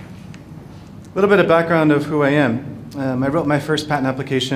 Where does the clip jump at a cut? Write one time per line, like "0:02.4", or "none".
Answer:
0:01.5